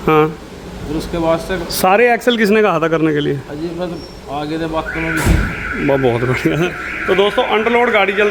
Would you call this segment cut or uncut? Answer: uncut